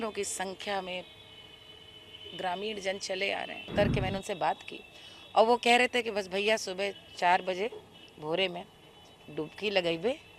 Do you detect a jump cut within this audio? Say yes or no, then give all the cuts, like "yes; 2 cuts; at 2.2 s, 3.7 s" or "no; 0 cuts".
yes; 1 cut; at 3.7 s